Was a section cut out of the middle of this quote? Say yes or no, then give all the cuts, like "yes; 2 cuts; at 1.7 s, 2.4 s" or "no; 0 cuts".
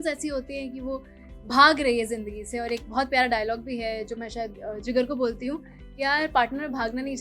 no; 0 cuts